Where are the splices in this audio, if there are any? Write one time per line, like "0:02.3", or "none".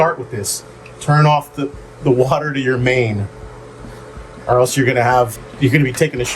0:05.4